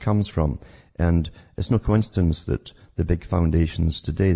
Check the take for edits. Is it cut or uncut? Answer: cut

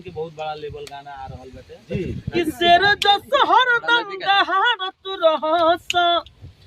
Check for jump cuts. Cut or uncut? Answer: cut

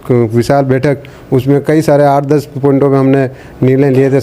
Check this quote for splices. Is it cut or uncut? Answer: uncut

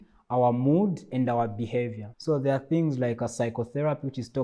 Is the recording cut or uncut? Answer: cut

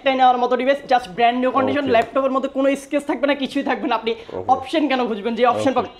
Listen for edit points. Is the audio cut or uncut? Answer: uncut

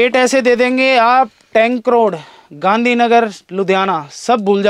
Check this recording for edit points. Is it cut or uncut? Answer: uncut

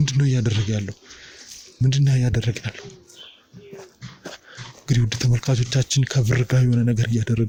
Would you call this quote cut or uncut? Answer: uncut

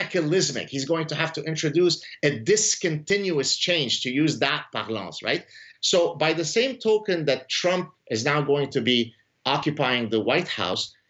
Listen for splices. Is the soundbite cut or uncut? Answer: cut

